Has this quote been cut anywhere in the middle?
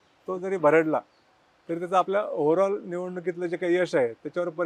no; 0 cuts

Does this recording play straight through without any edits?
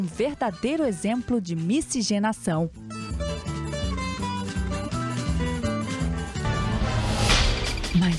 no; 1 cut; at 4.8 s

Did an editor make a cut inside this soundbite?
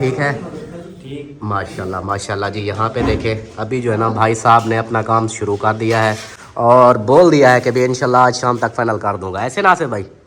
no; 0 cuts

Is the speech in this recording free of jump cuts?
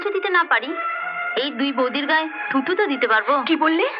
yes; 0 cuts

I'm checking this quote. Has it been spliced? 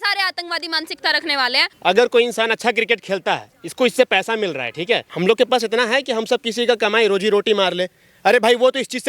yes; 2 cuts; at 1.6 s, 5.1 s

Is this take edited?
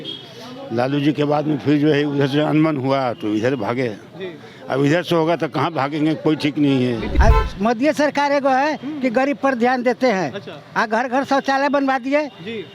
yes; 1 cut; at 7.1 s

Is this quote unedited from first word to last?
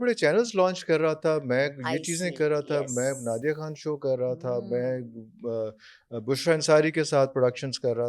yes; 0 cuts

